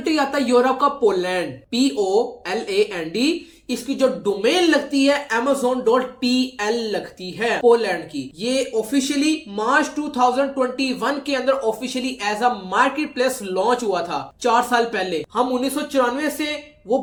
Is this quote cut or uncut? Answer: uncut